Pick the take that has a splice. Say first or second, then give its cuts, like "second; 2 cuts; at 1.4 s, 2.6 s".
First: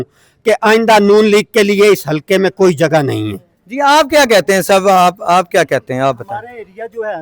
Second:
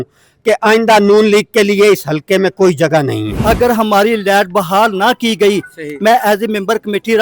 second; 1 cut; at 3.3 s